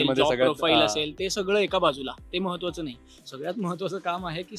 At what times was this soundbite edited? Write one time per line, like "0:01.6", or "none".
none